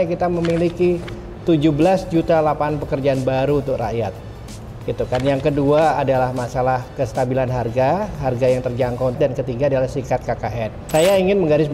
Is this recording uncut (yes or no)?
no